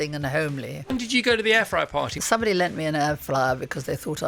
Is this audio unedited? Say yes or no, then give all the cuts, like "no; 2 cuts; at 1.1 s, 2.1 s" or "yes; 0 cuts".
no; 2 cuts; at 0.9 s, 2.1 s